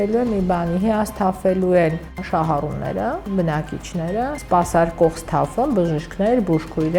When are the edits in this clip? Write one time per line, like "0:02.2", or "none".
0:02.2
0:03.2
0:04.4